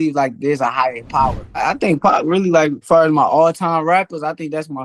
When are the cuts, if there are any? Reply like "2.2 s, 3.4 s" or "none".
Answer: 1.6 s, 2.8 s